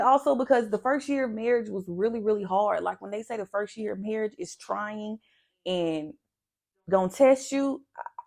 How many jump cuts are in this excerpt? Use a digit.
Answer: 0